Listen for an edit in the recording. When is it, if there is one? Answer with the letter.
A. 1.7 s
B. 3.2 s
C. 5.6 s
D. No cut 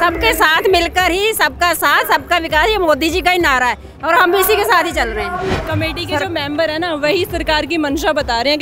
C